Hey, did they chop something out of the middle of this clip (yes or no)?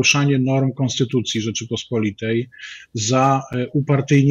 no